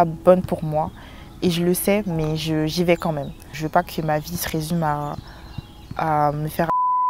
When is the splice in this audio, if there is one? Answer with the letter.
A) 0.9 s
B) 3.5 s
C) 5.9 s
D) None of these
B